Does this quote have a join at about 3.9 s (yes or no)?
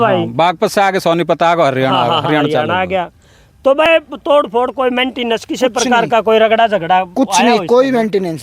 yes